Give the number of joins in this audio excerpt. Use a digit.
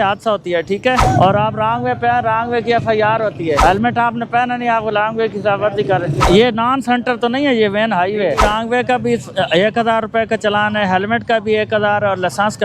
4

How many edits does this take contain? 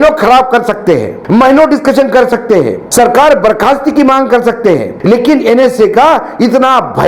3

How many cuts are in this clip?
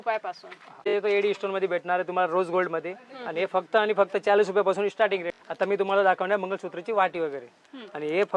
2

